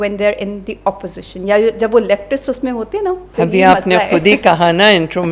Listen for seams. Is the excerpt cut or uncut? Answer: cut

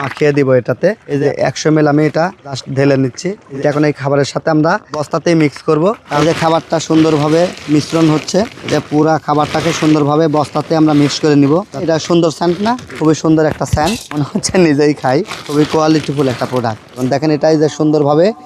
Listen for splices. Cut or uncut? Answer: cut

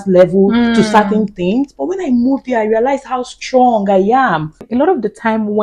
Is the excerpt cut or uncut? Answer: cut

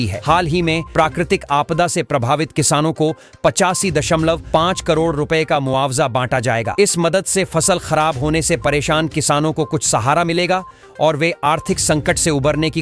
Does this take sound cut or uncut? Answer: uncut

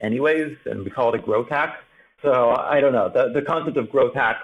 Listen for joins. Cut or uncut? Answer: uncut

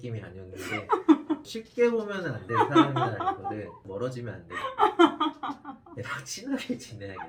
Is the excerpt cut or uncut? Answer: uncut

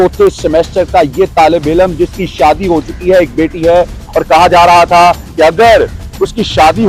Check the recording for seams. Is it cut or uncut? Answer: uncut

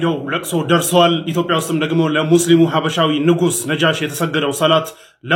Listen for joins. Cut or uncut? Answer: uncut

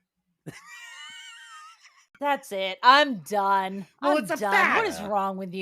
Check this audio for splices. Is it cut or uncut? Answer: cut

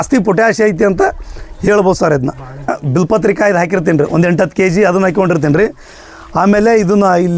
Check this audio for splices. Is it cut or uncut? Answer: cut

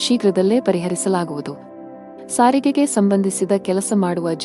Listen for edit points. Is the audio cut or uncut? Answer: cut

